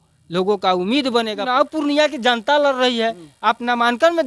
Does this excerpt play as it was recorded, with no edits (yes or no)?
no